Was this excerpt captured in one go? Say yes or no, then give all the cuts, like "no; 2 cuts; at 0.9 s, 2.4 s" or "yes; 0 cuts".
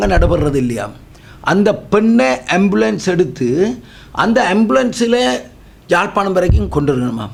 yes; 0 cuts